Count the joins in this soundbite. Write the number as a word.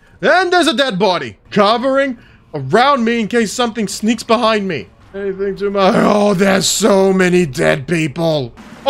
zero